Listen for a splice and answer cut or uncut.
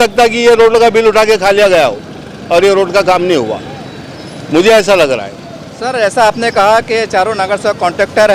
uncut